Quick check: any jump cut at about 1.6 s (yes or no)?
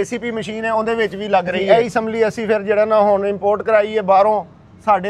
yes